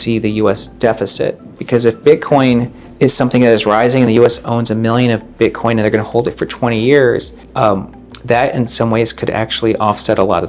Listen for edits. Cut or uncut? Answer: cut